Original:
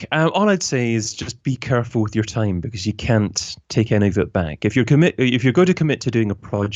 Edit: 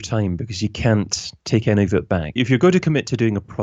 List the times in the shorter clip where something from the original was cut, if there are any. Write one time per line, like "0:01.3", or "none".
0:02.4